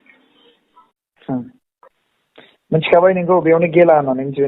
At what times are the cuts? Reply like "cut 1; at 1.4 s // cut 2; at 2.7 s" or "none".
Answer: cut 1; at 1.0 s